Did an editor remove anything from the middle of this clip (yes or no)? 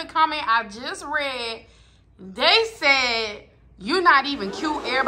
no